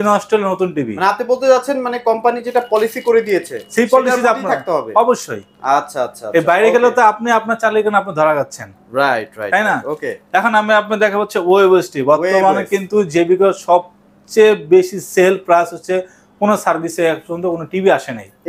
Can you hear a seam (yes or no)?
no